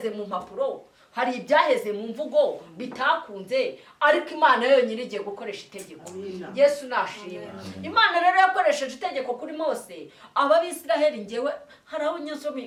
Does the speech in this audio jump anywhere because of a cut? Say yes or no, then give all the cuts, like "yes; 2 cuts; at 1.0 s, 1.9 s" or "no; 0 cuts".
no; 0 cuts